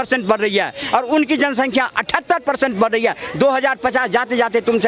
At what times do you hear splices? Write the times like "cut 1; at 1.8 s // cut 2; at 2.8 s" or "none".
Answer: none